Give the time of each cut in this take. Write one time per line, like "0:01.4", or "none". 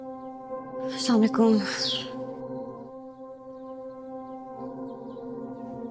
none